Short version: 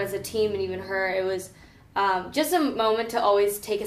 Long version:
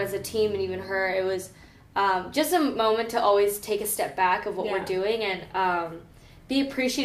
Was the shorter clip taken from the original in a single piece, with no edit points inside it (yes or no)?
yes